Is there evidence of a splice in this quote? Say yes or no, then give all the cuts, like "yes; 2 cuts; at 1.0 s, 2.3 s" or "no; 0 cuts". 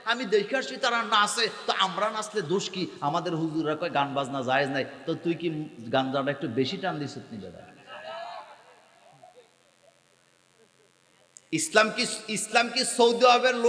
no; 0 cuts